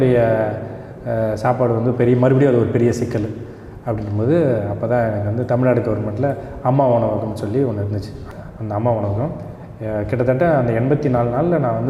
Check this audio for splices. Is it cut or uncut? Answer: uncut